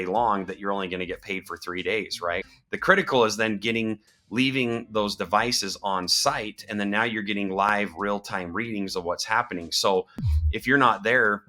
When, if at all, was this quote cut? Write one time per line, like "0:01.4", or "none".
0:02.5